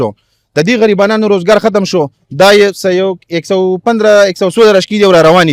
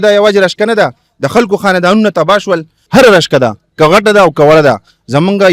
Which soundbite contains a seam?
second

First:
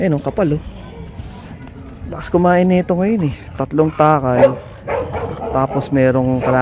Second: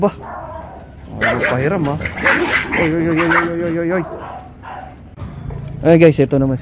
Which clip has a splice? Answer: second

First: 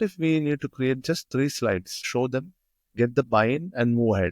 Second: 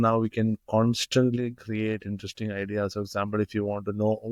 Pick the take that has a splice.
first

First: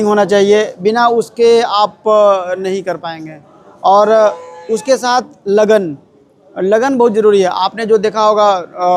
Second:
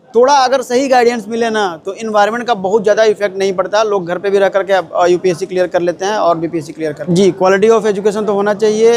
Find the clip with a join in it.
second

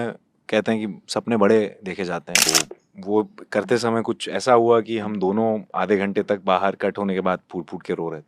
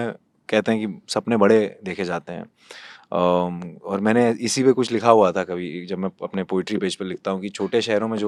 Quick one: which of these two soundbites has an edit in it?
first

